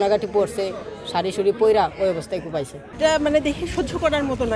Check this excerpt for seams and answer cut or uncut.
cut